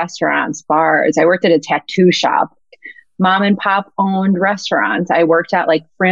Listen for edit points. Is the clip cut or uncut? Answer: cut